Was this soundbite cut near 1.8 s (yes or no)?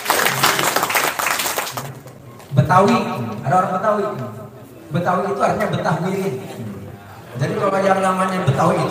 yes